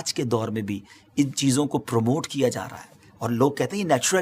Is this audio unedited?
yes; 0 cuts

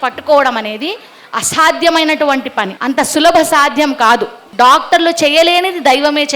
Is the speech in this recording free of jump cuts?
no; 2 cuts; at 2.7 s, 4.4 s

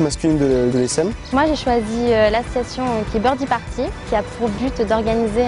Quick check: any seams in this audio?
yes; 1 cut; at 1.0 s

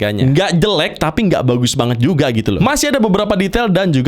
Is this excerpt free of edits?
no; 1 cut; at 2.6 s

